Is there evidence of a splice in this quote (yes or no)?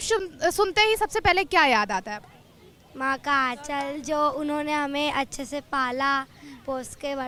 no